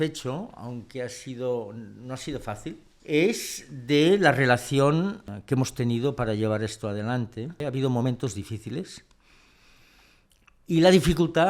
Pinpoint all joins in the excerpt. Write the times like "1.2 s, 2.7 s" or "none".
2.9 s, 5.3 s, 7.6 s